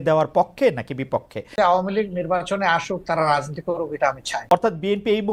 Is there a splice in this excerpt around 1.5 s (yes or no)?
yes